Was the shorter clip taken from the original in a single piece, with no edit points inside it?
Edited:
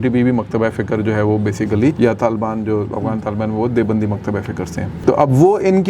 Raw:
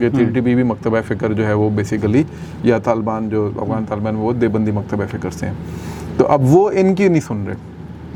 no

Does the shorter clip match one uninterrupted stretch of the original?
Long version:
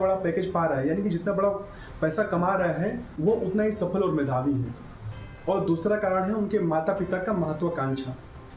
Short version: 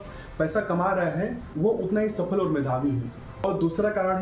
no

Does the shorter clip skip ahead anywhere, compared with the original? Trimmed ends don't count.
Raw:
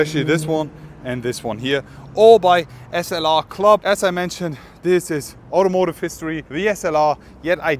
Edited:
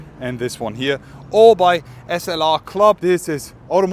yes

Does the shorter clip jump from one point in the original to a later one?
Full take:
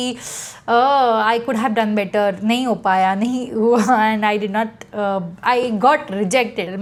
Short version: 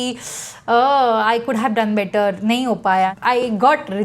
yes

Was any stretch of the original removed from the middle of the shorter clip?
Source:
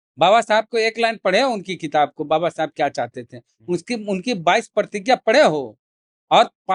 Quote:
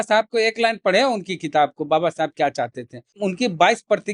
yes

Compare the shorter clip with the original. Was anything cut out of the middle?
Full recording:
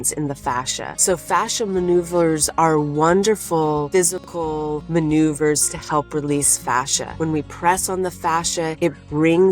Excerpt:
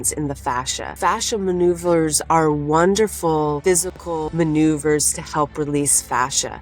yes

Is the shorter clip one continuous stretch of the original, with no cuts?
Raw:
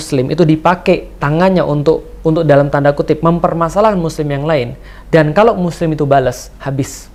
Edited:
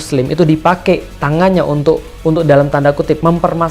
yes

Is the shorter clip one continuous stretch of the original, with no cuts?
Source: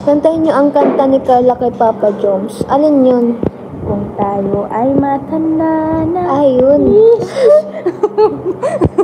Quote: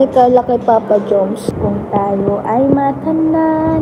no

